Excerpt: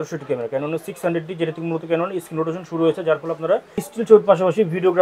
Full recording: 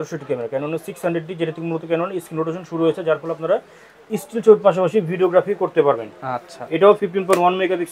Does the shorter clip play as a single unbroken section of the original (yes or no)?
no